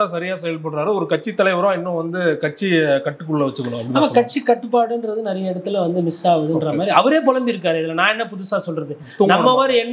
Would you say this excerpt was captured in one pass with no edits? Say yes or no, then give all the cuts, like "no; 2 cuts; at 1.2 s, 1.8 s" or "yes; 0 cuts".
yes; 0 cuts